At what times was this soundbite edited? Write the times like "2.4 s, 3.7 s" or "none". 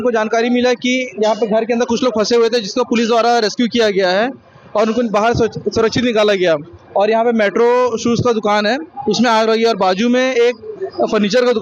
none